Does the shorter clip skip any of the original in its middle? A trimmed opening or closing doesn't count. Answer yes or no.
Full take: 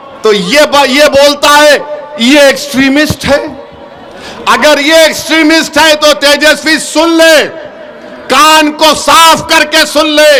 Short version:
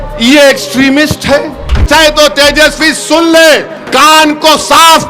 yes